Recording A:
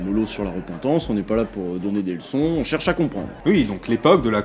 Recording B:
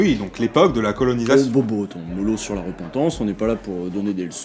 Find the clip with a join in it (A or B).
A